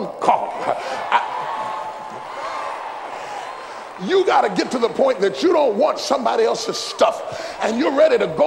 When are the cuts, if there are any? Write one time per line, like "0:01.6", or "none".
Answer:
0:03.3